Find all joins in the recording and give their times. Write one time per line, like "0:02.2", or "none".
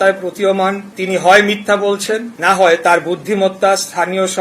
0:00.9
0:02.3